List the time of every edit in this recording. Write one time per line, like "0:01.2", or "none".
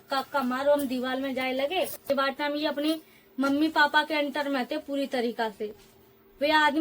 0:02.0